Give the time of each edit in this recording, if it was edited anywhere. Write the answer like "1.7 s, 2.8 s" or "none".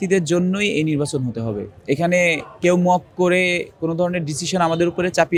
none